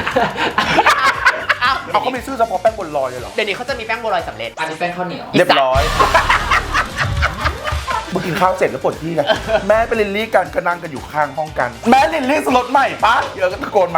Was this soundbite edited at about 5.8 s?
no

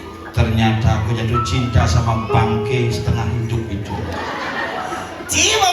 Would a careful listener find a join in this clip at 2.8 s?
no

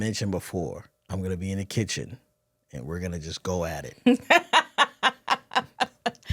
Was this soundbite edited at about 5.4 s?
no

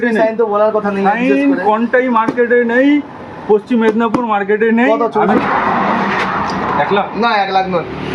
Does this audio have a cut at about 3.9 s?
no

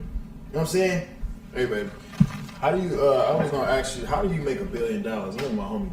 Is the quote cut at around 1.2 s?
yes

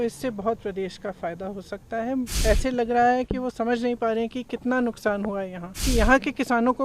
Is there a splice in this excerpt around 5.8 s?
yes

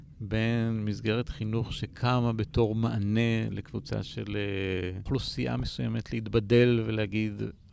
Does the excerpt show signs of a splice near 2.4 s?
no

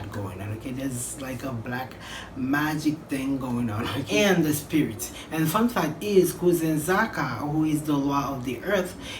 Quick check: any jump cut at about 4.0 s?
yes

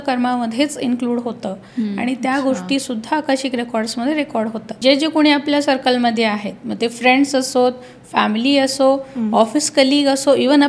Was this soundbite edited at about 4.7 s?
yes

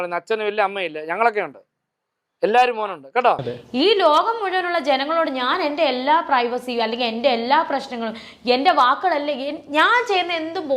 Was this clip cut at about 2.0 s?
no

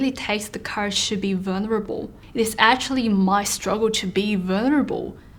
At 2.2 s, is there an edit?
yes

